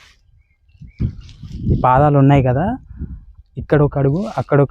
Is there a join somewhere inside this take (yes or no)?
yes